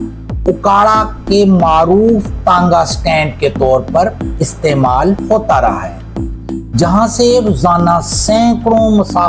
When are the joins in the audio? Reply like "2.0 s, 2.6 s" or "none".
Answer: none